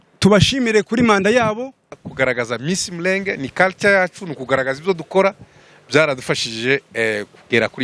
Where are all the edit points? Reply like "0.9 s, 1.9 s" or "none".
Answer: 2.0 s